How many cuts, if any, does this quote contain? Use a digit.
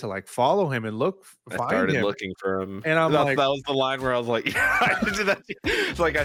0